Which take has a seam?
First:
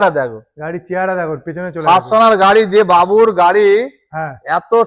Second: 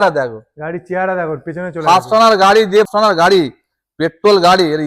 second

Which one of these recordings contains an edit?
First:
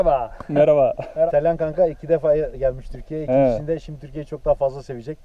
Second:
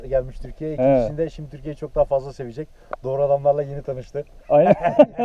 first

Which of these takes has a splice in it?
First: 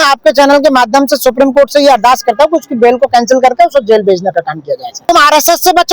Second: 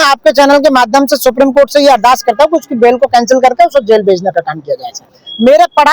first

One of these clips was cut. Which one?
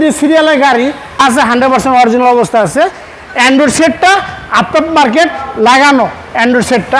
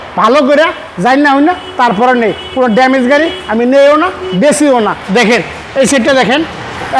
first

